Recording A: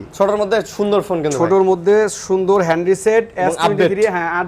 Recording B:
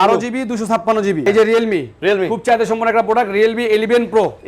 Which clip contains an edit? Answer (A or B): B